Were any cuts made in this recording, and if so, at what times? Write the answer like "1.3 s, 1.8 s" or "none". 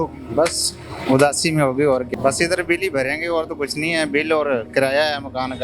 2.1 s